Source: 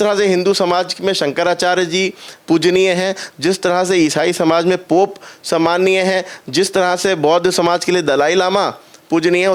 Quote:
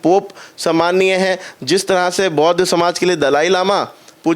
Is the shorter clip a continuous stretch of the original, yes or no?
yes